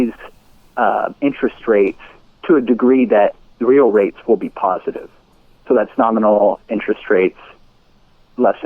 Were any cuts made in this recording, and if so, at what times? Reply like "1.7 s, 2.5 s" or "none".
none